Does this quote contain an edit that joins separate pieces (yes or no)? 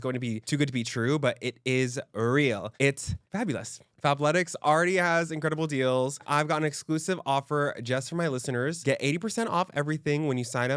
yes